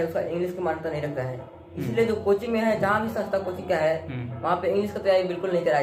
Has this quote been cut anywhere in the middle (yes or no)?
no